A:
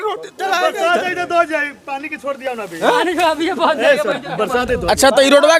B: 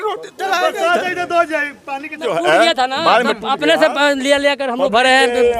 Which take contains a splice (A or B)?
B